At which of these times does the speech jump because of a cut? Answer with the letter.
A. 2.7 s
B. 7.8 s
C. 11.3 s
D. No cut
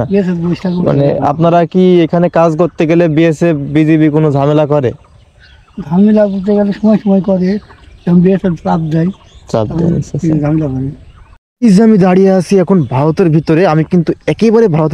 C